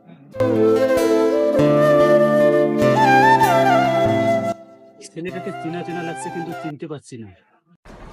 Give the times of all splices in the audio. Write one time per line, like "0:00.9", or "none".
none